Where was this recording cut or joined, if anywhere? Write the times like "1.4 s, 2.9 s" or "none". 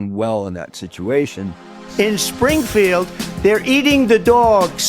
1.7 s